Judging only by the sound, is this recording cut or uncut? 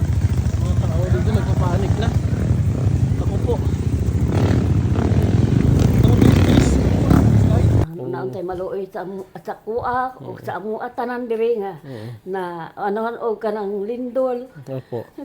cut